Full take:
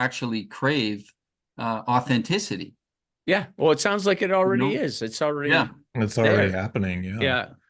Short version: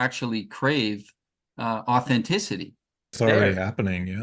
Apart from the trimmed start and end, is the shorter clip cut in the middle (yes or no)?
yes